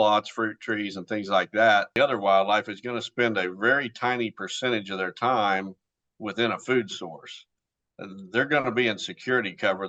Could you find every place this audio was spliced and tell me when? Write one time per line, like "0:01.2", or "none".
0:02.0